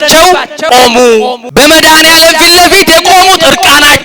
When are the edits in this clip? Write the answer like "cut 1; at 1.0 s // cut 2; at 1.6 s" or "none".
cut 1; at 0.7 s // cut 2; at 1.4 s